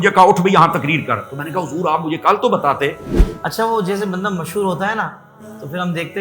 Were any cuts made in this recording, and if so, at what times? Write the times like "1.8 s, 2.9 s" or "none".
3.1 s